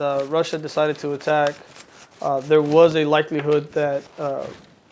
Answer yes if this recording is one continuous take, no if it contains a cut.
yes